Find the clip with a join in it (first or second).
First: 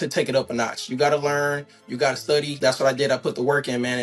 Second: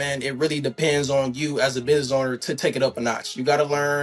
first